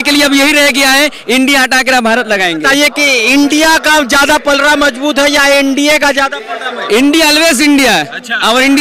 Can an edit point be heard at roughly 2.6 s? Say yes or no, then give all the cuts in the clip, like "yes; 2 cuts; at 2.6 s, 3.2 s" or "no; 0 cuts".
yes; 1 cut; at 2.6 s